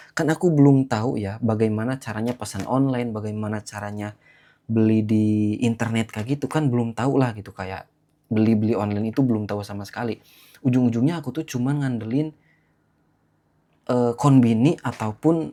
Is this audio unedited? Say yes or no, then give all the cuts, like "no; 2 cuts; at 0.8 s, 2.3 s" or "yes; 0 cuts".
yes; 0 cuts